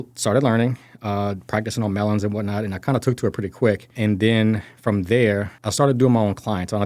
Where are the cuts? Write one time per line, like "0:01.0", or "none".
0:03.9
0:05.6